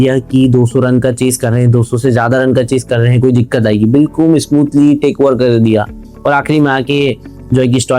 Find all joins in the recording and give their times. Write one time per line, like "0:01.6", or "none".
none